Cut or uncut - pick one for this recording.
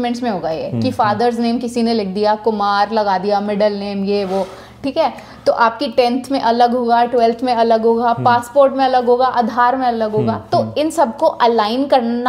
uncut